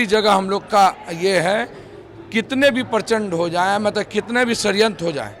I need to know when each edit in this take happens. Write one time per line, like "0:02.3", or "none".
none